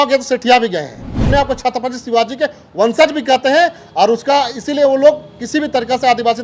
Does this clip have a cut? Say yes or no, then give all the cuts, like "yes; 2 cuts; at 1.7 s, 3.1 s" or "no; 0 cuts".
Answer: yes; 1 cut; at 1.2 s